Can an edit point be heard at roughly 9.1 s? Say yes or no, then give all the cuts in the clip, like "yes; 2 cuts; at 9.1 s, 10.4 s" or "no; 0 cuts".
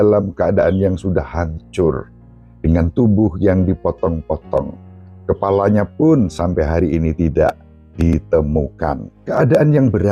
yes; 1 cut; at 9.1 s